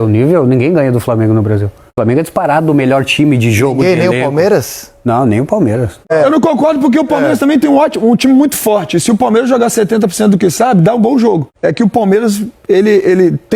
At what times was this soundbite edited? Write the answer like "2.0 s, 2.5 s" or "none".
1.8 s, 6.1 s, 11.5 s

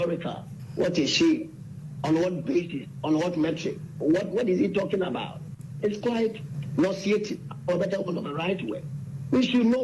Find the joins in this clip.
5.6 s, 6.5 s

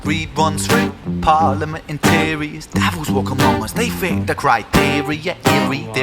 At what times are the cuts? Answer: 1.4 s

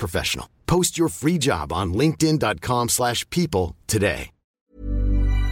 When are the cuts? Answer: 4.4 s

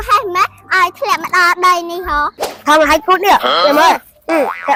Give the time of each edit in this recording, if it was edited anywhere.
none

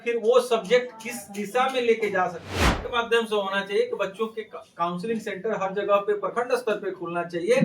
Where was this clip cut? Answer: 2.8 s

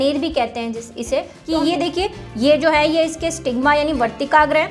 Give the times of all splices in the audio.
1.4 s

